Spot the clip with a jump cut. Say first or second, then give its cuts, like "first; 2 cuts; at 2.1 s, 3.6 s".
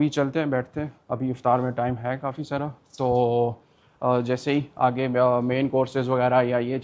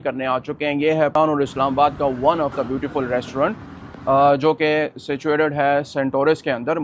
second; 1 cut; at 1.1 s